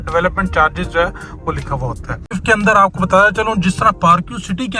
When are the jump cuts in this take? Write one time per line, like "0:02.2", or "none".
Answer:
0:02.4